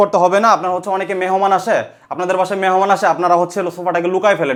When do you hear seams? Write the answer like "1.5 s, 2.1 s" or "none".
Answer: none